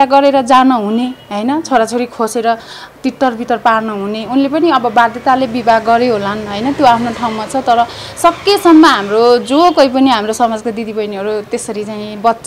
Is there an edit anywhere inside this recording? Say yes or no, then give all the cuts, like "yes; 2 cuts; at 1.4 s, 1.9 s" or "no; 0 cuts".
no; 0 cuts